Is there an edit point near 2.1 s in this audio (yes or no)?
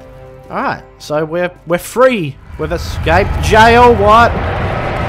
yes